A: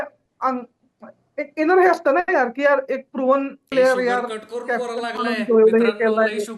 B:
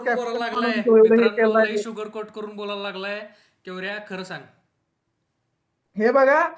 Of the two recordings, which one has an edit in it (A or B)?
A